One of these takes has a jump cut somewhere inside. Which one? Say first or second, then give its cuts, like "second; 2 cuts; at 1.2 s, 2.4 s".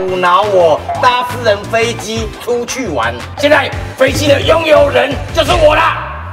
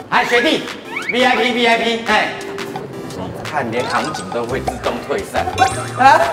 first; 1 cut; at 3.2 s